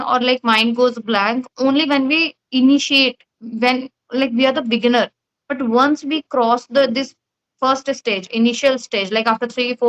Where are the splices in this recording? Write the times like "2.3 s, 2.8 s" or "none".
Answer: none